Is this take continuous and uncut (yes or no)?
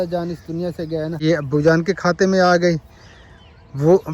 no